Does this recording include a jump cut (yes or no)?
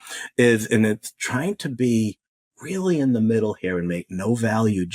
no